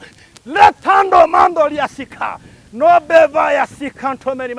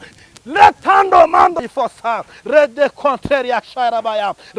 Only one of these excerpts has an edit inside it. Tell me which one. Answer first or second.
second